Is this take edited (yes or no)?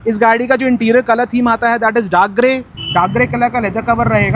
yes